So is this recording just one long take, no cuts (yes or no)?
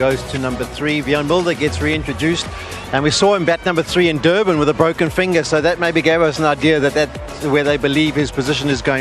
no